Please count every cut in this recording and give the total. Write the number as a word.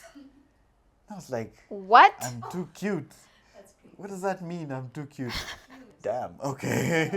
one